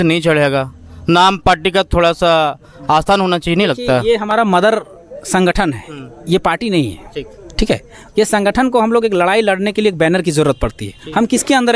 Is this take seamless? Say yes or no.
yes